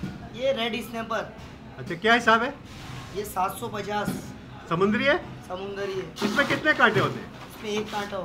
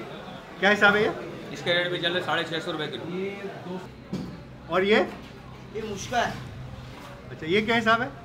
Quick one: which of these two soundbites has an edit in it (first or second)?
second